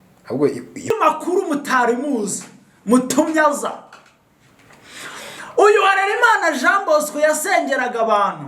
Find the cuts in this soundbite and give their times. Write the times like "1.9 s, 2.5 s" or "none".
0.9 s

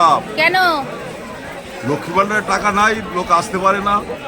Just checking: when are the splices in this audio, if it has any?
none

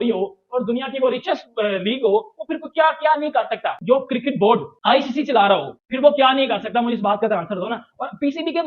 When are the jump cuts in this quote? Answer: 3.8 s

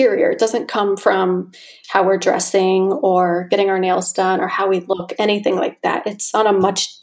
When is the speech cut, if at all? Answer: none

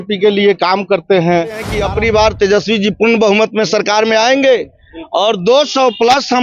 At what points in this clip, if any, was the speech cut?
1.7 s

